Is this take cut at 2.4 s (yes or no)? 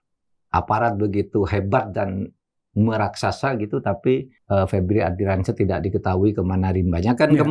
no